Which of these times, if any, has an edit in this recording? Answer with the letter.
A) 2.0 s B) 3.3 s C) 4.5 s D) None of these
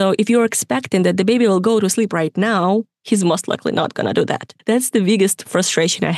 C